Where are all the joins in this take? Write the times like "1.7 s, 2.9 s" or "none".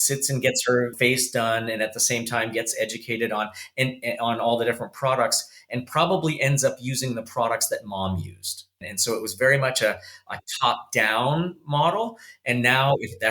0.9 s, 8.7 s